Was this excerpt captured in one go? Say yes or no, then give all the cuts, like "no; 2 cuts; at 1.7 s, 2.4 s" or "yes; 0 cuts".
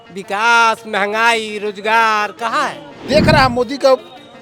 no; 1 cut; at 3.0 s